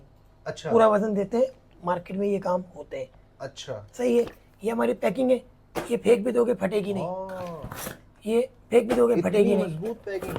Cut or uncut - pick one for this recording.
uncut